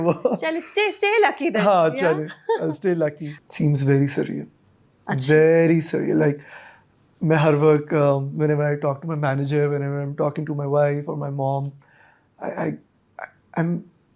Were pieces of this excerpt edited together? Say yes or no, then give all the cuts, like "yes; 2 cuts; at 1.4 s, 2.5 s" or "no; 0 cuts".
yes; 1 cut; at 3.4 s